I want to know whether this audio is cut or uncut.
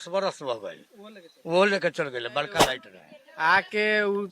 cut